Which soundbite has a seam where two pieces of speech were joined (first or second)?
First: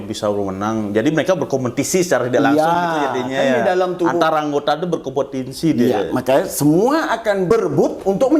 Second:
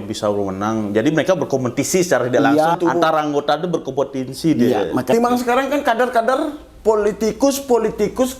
second